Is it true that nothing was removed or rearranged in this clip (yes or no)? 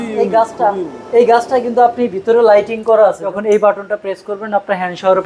no